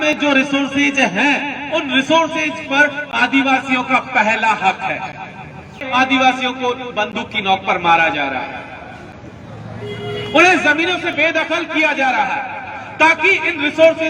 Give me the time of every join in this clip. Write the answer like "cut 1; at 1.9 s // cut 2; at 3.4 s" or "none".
cut 1; at 5.8 s